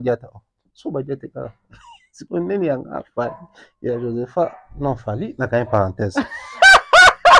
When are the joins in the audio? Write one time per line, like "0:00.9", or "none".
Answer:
none